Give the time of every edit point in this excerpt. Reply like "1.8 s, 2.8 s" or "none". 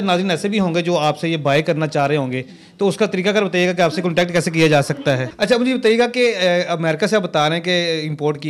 5.3 s